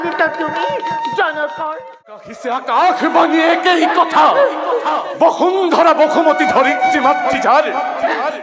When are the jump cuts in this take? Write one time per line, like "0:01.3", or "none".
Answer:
0:02.1